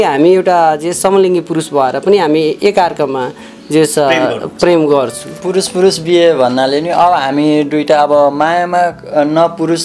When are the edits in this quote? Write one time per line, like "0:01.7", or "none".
0:05.3